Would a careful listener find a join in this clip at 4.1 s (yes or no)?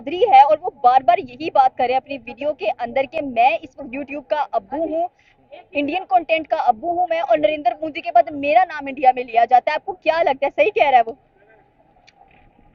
no